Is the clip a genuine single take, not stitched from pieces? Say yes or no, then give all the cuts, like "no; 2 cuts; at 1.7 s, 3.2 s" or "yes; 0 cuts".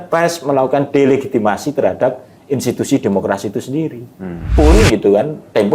no; 1 cut; at 4.5 s